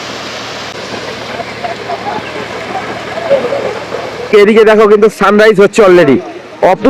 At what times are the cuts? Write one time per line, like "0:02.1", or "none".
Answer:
0:00.7
0:04.3